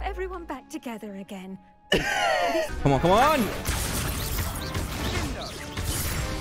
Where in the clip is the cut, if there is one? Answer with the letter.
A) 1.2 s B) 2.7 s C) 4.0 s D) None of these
B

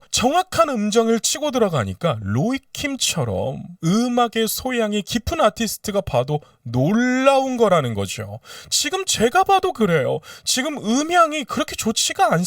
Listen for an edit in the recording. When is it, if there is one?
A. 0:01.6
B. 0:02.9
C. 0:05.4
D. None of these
D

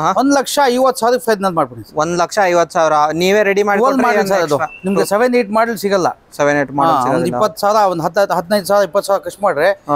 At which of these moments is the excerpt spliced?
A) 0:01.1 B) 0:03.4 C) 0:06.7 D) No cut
D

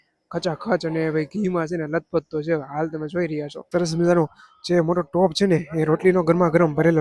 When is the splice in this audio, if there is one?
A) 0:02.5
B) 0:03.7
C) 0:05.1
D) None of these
B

